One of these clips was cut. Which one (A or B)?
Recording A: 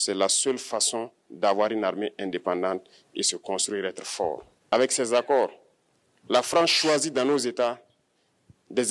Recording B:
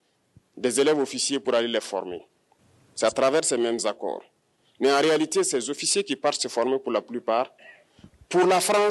A